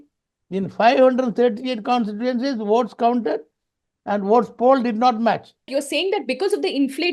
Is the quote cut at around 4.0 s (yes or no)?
no